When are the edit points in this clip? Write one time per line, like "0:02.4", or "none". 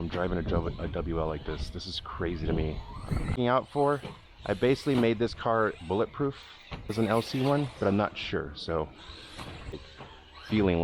0:03.3
0:06.9
0:09.8